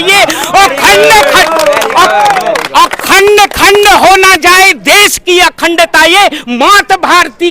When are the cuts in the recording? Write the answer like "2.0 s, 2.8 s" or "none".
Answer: none